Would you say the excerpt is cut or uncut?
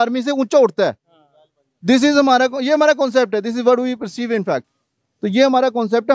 uncut